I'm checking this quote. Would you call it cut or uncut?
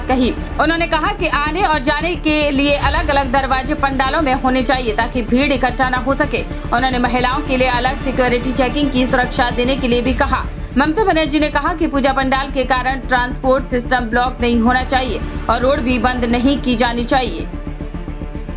uncut